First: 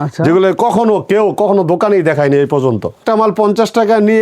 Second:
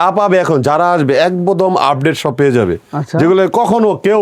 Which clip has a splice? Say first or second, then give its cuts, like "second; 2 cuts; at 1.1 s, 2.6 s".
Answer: first; 1 cut; at 3.0 s